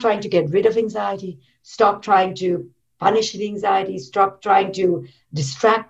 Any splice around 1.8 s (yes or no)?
no